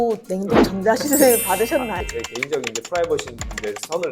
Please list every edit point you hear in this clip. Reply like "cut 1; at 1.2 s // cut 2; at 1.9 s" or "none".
none